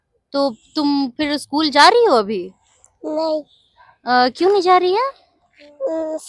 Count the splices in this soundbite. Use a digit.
0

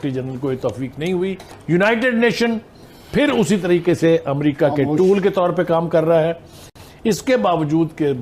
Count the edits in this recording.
2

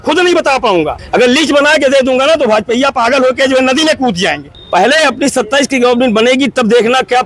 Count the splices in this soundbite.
2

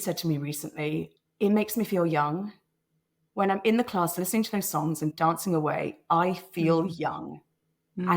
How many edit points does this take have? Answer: 2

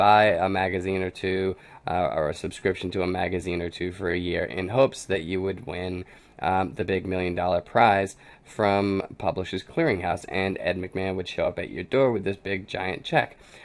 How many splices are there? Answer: 1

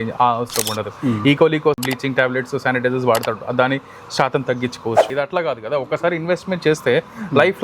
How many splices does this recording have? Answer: 2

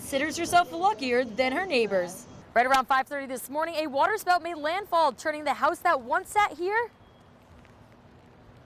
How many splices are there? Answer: 1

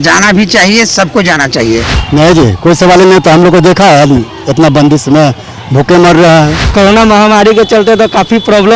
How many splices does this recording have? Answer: 2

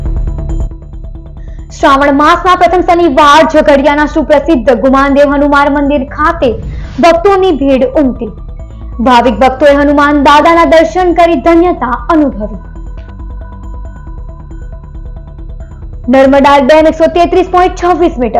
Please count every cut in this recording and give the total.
0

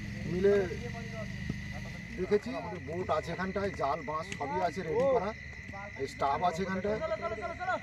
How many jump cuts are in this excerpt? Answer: 1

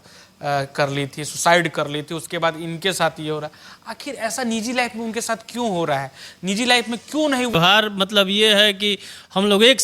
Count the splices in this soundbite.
1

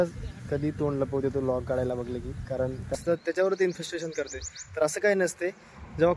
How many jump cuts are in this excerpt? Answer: 1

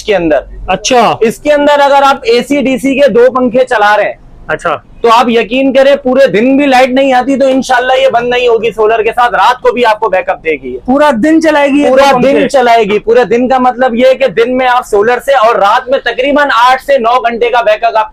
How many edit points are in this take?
0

